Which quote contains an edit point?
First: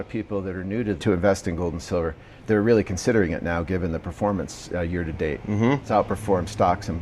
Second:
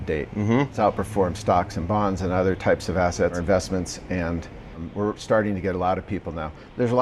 first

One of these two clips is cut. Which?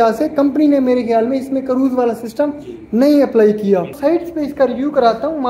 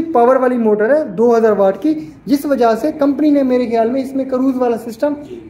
first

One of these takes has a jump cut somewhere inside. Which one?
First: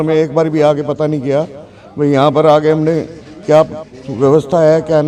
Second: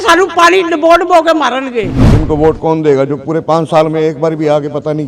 second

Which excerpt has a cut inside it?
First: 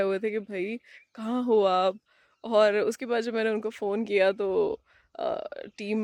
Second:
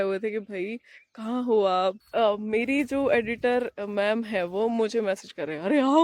second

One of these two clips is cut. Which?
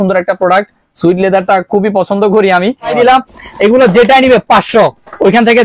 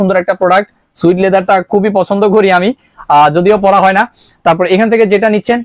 first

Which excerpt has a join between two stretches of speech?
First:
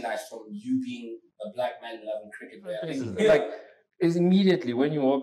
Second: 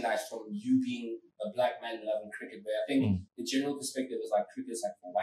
first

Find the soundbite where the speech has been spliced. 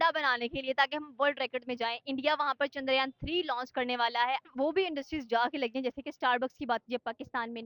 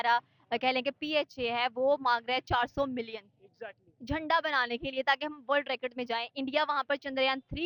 first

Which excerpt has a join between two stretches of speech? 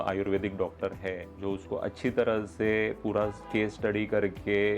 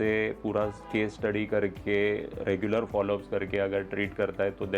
first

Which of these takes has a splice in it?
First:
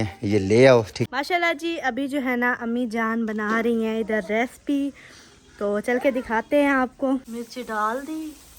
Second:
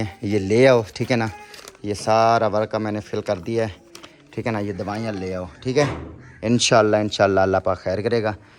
first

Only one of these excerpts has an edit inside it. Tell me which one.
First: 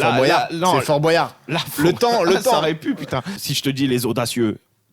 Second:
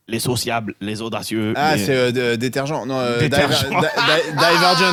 first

